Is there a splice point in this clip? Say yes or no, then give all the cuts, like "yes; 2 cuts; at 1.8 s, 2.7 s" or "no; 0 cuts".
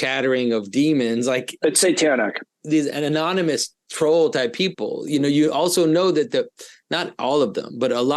yes; 2 cuts; at 1.6 s, 2.5 s